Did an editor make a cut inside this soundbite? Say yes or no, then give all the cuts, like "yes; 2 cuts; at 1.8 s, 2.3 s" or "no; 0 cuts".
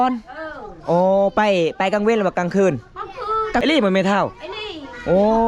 yes; 1 cut; at 3.6 s